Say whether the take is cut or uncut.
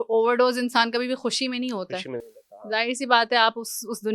uncut